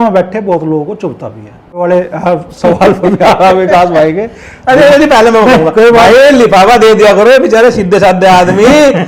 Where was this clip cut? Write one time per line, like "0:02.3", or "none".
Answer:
0:01.7

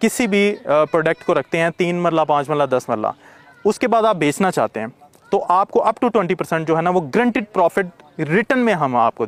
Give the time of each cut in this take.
none

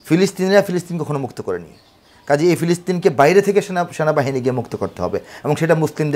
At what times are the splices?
none

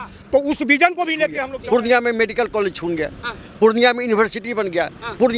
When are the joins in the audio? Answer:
0:01.5

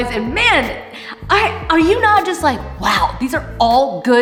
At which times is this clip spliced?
none

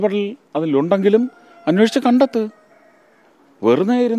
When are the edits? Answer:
none

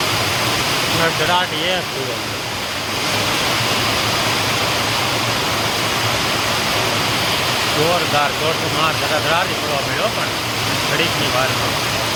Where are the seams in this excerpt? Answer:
none

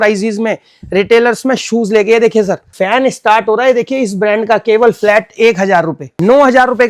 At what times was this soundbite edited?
0:02.7
0:06.0

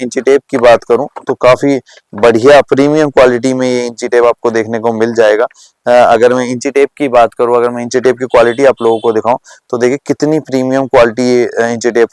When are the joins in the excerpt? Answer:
none

